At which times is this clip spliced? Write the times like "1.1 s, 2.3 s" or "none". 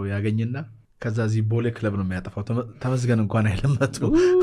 none

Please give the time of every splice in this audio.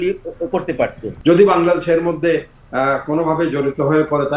1.1 s

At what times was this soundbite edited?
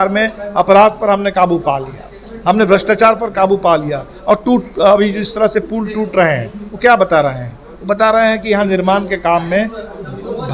none

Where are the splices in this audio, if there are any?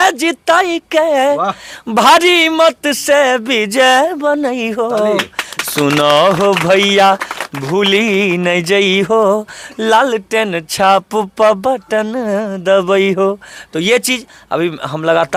none

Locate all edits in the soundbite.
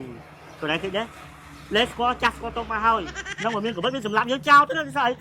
3.2 s

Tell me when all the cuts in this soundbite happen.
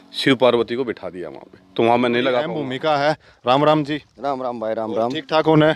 2.6 s

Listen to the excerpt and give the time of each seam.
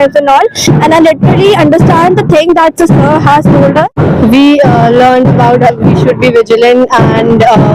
3.9 s

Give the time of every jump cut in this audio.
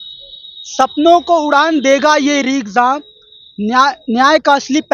none

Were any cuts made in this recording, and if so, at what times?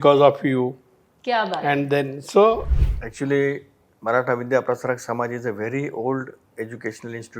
2.7 s

